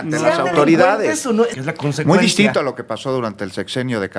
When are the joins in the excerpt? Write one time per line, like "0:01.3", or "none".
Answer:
0:01.6